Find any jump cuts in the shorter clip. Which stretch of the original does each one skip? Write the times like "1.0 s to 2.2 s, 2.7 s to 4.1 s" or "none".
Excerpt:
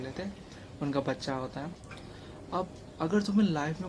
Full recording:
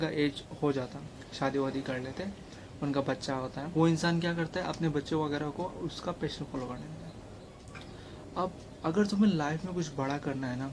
3.7 s to 7.5 s